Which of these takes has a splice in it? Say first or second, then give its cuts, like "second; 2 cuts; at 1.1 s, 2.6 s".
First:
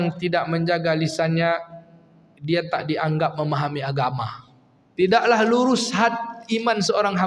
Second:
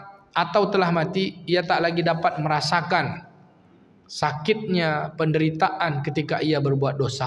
first; 1 cut; at 4.8 s